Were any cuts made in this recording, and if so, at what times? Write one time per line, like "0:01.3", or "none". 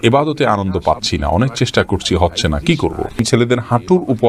0:03.1